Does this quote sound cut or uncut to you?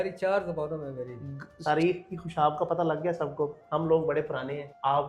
cut